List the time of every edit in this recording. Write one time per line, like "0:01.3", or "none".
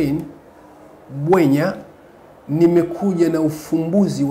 none